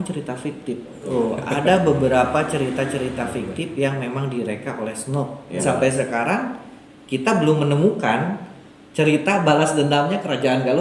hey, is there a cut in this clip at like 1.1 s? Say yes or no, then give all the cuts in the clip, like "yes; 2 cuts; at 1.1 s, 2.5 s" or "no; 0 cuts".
yes; 2 cuts; at 1.1 s, 5.6 s